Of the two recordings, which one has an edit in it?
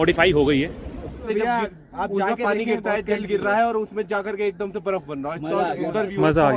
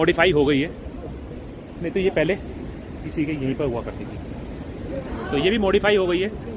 first; 1 cut; at 1.3 s

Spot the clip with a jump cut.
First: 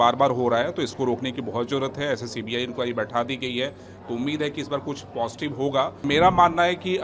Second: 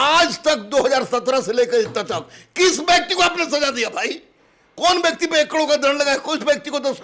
first; 1 cut; at 6.0 s

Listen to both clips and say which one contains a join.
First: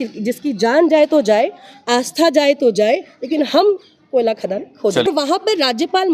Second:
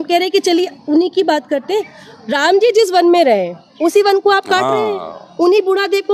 first; 1 cut; at 5.1 s

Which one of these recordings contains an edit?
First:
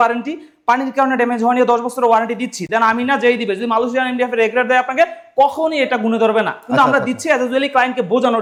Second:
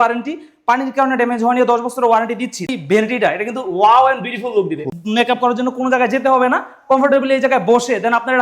second; 2 cuts; at 2.7 s, 4.9 s

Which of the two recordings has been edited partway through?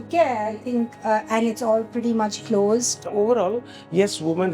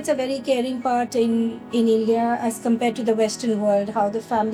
first; 1 cut; at 3.0 s

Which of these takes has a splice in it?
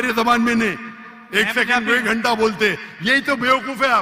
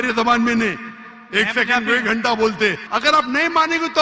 second; 1 cut; at 2.8 s

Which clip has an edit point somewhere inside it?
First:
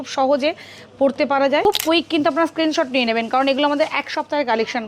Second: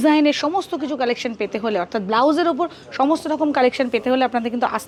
first; 1 cut; at 1.6 s

